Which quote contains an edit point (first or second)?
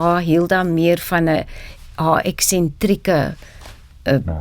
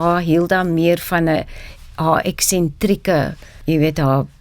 second